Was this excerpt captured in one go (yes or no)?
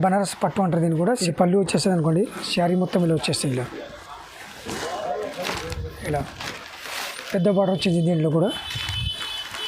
no